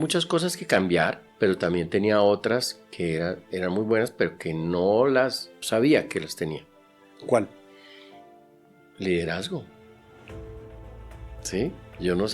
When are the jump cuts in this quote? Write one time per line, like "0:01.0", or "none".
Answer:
0:01.2
0:05.5